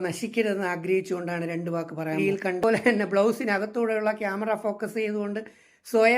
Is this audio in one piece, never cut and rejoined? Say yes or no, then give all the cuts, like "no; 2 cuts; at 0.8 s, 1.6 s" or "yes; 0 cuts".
no; 1 cut; at 2.6 s